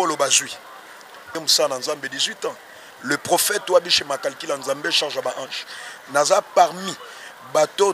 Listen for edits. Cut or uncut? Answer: cut